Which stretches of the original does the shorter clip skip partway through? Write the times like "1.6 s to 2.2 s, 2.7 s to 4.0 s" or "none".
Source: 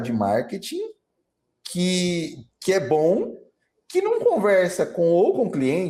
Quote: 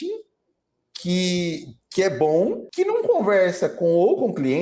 3.3 s to 3.8 s